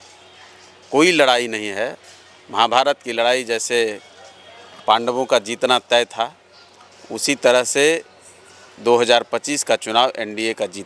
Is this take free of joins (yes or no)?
yes